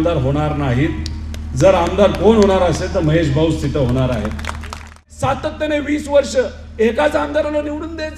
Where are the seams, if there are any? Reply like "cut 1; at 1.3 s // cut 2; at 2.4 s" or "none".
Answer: cut 1; at 5.0 s